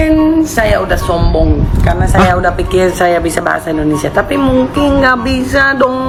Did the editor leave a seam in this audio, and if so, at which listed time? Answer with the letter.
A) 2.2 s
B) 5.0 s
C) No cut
C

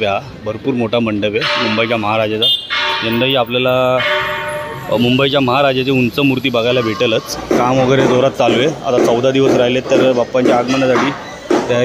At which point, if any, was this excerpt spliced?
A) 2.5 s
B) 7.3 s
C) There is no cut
B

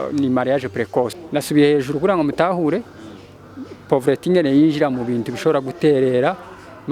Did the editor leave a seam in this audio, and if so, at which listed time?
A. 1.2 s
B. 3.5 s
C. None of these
A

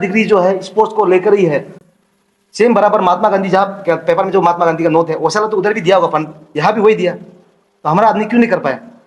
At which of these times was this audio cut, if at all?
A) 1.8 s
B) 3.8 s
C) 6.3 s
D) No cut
A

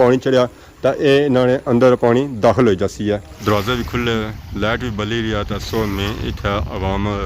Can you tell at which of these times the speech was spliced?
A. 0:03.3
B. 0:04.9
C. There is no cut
A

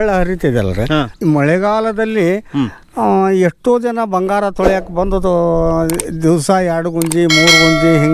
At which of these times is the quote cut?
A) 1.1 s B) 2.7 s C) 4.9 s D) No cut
A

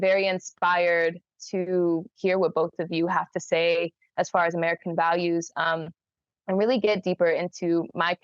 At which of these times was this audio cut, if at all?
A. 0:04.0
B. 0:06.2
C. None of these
C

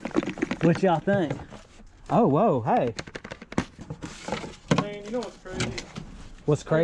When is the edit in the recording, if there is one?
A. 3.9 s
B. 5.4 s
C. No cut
A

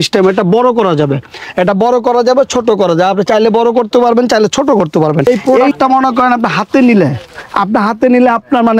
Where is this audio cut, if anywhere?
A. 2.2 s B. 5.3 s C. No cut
B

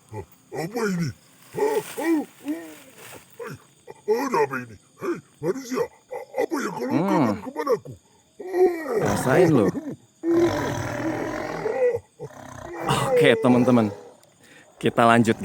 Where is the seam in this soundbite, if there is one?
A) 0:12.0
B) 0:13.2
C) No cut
B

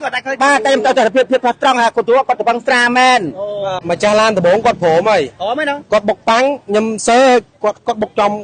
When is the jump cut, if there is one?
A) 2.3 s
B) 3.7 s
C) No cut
B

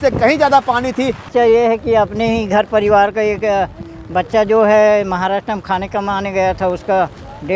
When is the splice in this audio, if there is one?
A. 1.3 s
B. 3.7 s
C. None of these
A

